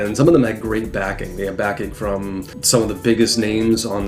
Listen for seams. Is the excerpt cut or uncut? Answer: cut